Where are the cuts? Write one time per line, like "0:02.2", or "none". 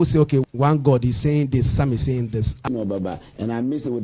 0:02.7